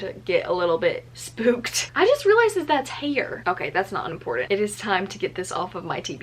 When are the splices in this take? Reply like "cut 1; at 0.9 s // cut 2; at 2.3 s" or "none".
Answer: cut 1; at 1.8 s // cut 2; at 4.5 s